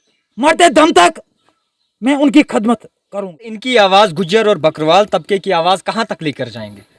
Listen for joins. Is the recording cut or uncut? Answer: cut